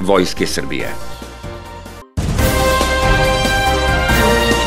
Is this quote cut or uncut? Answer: cut